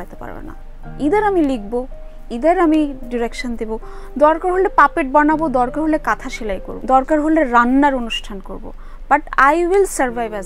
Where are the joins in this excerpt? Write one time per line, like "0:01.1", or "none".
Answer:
0:06.7